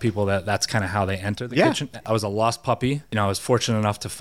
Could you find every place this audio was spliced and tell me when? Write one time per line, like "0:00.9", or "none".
0:02.0
0:03.0